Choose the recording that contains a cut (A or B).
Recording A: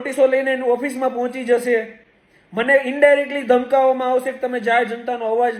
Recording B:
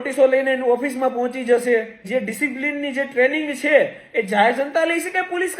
B